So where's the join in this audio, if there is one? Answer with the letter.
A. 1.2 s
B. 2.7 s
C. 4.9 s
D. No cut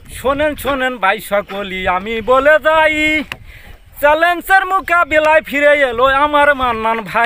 D